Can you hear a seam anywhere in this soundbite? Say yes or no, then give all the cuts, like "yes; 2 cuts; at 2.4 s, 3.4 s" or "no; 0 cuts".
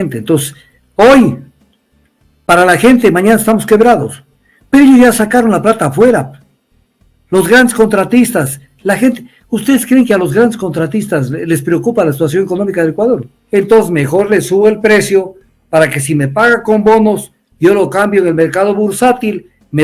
yes; 1 cut; at 13.3 s